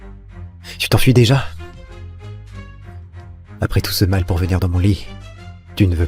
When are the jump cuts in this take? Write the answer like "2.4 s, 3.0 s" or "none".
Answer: 0.9 s, 1.5 s, 3.2 s